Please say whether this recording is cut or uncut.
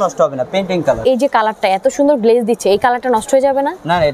cut